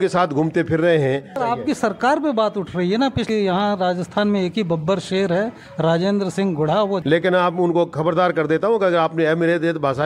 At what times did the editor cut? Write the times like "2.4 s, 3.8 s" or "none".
1.3 s, 3.2 s, 7.0 s